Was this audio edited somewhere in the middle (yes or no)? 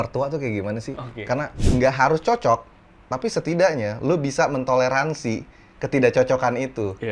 yes